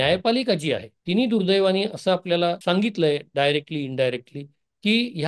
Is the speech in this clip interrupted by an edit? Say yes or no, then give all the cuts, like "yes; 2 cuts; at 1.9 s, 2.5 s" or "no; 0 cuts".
yes; 2 cuts; at 0.9 s, 2.6 s